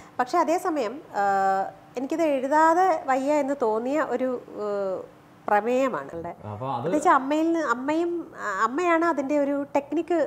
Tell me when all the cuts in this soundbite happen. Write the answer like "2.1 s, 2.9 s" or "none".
6.1 s